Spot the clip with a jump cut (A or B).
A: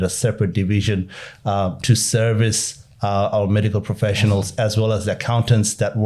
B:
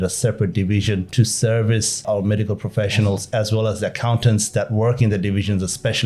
B